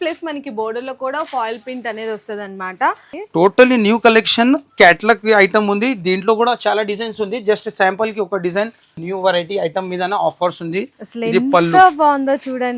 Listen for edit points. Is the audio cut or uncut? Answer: cut